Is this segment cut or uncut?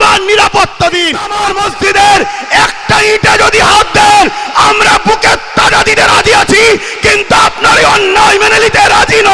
cut